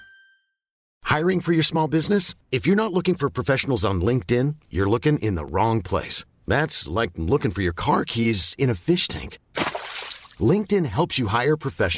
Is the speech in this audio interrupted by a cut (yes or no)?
yes